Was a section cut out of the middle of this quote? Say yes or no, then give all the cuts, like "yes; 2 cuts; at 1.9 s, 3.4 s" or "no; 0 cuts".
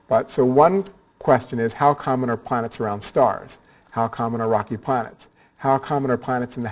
no; 0 cuts